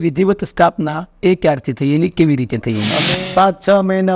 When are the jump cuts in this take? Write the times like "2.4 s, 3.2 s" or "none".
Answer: 3.0 s